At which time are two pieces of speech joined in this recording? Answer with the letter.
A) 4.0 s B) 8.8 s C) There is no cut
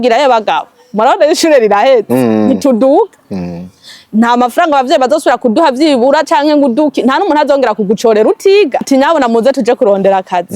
B